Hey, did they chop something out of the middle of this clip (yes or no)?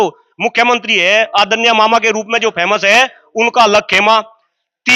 no